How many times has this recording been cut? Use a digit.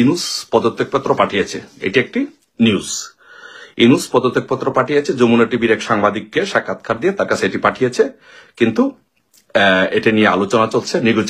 0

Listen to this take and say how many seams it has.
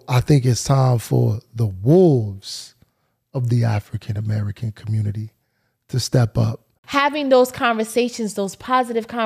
1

